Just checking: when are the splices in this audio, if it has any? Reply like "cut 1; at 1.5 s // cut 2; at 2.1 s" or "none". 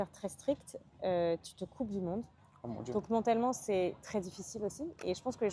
none